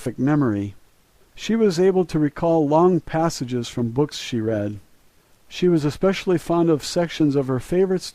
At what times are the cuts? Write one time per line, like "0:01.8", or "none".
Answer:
0:01.6

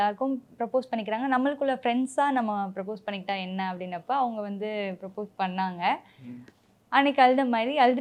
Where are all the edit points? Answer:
none

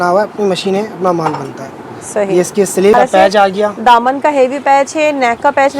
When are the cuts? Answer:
0:02.9

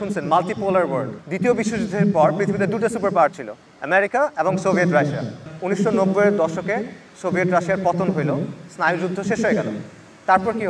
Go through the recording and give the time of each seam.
0:01.2
0:05.5

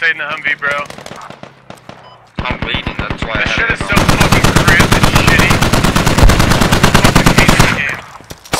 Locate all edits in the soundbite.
none

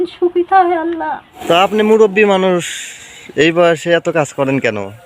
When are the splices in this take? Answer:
0:01.3

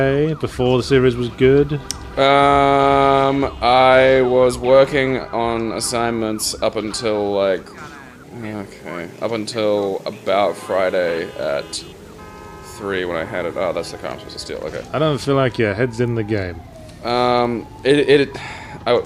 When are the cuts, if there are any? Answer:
0:15.9

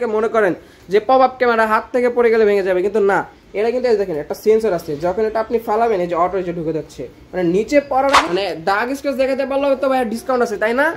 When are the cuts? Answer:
0:08.2

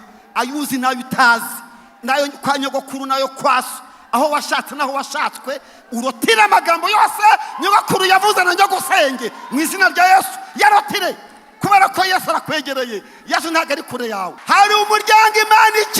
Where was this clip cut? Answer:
0:14.3

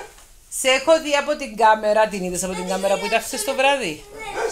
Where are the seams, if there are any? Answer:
none

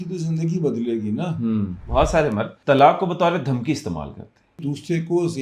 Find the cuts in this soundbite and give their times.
0:01.8
0:02.5
0:04.6

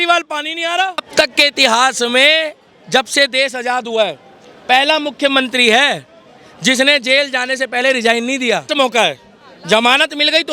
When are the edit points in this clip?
0:01.1
0:08.7

